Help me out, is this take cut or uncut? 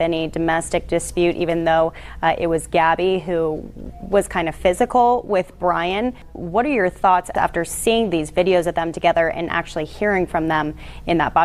cut